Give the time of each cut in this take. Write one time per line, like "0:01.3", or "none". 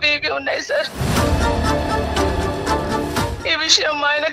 0:03.3